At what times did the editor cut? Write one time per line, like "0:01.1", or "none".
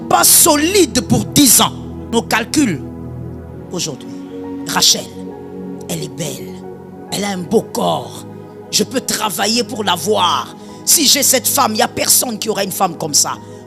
0:02.1